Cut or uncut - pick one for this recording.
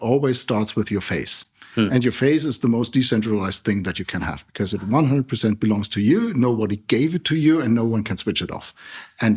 uncut